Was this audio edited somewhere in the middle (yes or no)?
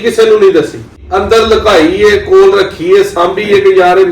yes